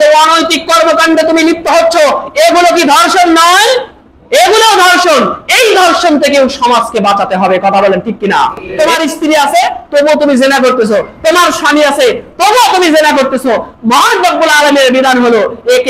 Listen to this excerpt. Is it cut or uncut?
cut